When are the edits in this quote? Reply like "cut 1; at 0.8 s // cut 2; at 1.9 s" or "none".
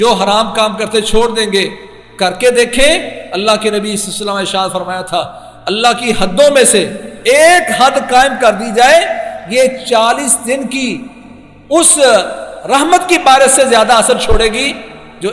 none

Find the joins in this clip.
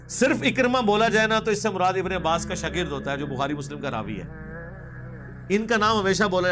cut 1; at 4.2 s // cut 2; at 5.5 s

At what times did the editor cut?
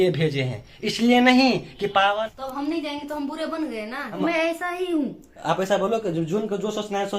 cut 1; at 2.1 s // cut 2; at 4.1 s

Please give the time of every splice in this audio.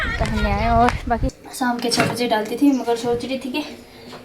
cut 1; at 1.4 s

